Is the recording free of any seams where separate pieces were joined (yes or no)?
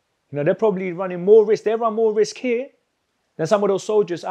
yes